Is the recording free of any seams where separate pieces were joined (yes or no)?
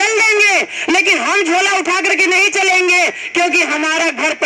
yes